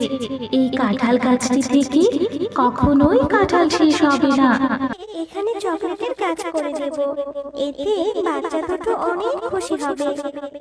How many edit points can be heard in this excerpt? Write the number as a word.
one